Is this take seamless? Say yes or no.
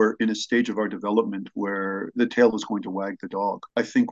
yes